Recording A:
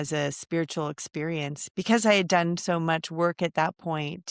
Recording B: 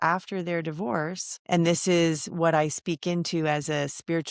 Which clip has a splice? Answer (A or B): B